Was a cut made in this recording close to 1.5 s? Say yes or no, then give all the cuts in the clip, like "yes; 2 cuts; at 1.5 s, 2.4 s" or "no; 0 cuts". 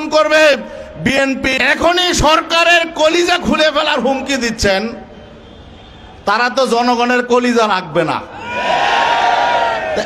yes; 1 cut; at 1.5 s